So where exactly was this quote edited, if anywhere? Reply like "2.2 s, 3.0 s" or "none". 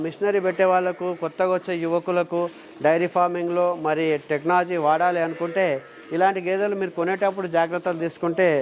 none